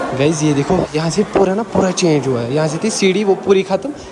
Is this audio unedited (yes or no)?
yes